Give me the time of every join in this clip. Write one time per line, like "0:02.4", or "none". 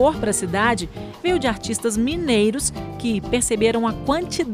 none